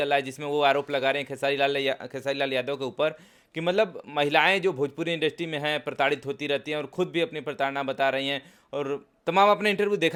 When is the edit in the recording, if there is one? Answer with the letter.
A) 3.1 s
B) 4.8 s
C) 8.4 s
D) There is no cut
D